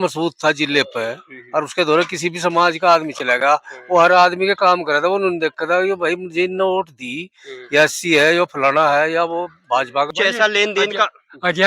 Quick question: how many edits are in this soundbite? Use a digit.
1